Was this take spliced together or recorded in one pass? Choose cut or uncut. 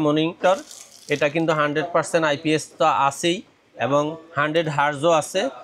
uncut